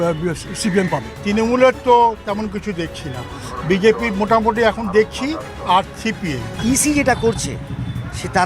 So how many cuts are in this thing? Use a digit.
2